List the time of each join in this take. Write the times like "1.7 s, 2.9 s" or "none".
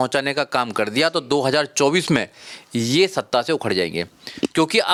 none